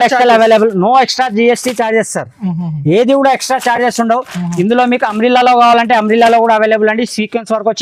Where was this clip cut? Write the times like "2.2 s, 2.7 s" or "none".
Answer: none